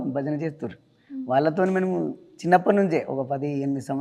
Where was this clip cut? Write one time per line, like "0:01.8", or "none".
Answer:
none